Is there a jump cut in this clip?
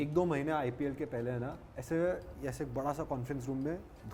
no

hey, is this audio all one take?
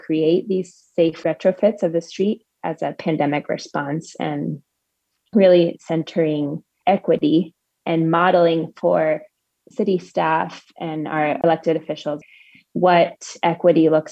yes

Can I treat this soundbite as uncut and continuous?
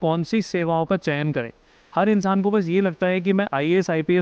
yes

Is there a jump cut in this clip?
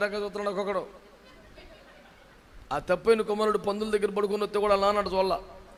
no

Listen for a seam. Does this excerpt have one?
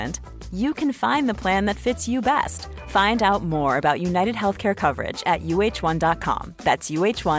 no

